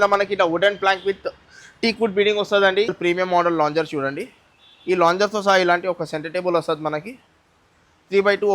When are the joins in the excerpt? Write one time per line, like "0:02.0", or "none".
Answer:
0:02.9